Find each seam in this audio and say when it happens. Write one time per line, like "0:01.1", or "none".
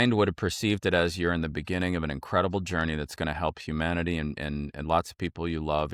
none